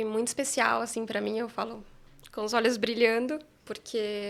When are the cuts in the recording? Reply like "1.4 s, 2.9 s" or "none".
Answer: none

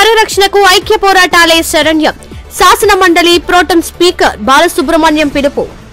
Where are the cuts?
none

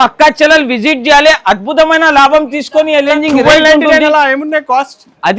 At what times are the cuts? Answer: 3.1 s

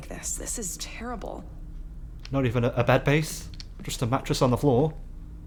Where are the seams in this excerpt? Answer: none

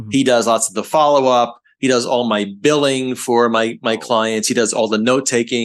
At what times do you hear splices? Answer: none

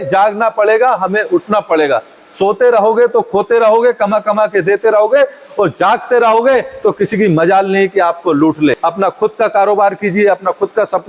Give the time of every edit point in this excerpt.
8.8 s

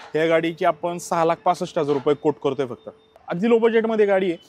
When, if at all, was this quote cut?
3.2 s

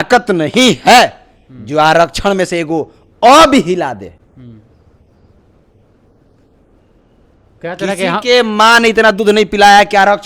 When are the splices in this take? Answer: none

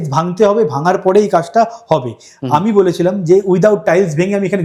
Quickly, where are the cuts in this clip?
none

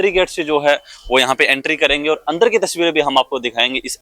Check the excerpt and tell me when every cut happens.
none

